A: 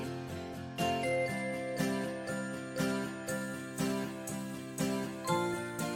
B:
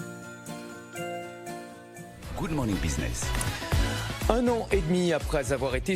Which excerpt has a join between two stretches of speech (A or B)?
B